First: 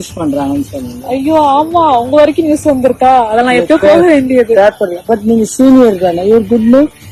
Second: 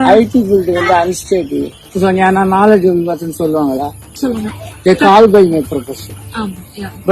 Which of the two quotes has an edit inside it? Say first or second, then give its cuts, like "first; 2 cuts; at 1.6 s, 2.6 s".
second; 1 cut; at 1.9 s